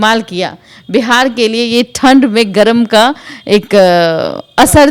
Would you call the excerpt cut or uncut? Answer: uncut